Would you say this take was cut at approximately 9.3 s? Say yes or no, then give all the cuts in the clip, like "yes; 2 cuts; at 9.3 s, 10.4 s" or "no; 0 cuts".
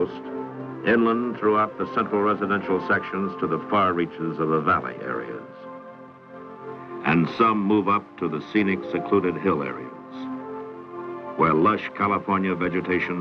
no; 1 cut; at 5.0 s